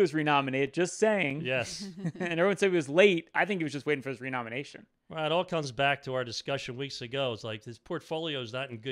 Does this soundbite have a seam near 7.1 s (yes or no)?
no